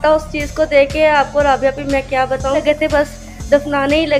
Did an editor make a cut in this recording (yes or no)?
yes